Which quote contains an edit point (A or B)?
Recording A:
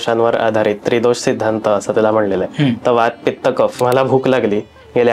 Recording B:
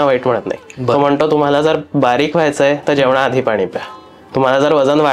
A